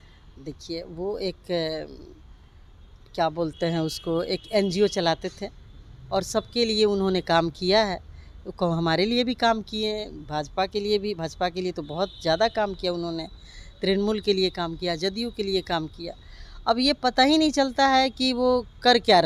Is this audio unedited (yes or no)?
yes